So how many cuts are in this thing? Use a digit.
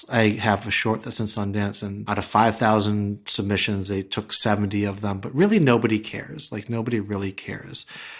1